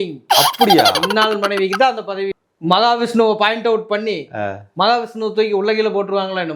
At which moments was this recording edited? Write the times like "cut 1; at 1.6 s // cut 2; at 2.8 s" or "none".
cut 1; at 2.4 s